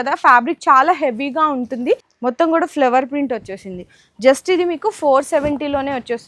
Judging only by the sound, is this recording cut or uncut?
cut